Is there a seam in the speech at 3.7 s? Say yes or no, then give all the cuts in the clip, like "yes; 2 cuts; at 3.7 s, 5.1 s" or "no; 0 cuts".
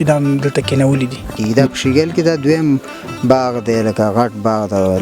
no; 1 cut; at 1.4 s